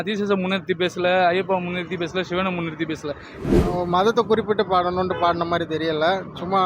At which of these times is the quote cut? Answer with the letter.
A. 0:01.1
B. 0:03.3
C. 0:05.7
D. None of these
B